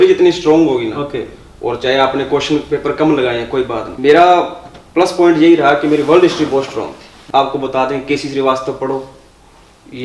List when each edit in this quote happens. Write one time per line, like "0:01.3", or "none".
0:03.9
0:07.1